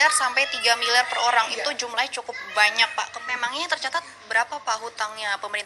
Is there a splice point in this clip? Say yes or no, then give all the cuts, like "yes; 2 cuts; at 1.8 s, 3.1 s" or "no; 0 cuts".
yes; 1 cut; at 3.1 s